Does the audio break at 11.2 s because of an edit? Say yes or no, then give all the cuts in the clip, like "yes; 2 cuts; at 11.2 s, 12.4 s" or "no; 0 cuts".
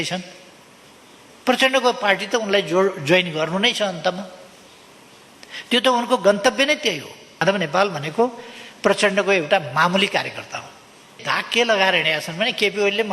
yes; 2 cuts; at 7.4 s, 11.2 s